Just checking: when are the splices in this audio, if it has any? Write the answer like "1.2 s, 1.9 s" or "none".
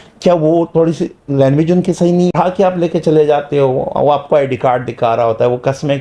2.3 s